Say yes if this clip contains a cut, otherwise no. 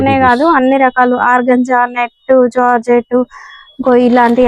no